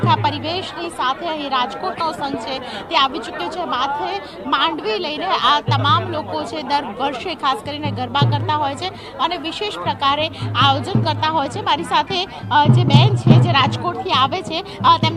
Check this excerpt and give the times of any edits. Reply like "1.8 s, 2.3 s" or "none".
none